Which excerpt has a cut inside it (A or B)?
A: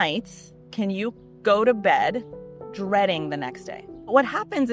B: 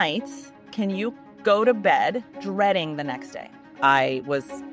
B